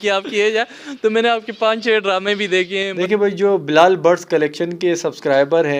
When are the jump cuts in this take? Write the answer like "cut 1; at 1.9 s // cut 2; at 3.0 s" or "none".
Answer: cut 1; at 2.9 s